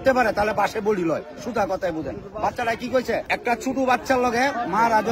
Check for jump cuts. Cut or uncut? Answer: cut